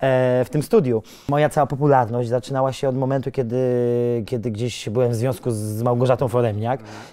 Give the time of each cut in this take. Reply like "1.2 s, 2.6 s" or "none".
1.2 s